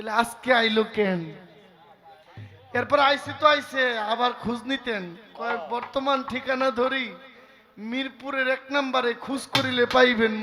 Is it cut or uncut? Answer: uncut